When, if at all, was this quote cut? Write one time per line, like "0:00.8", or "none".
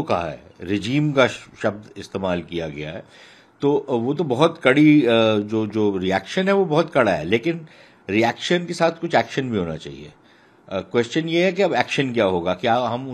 none